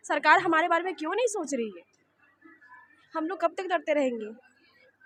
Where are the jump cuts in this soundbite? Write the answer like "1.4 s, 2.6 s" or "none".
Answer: none